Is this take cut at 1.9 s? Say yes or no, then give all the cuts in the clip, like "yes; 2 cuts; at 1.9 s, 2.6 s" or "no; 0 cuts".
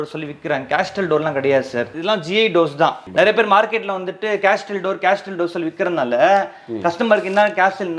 yes; 2 cuts; at 1.9 s, 3.0 s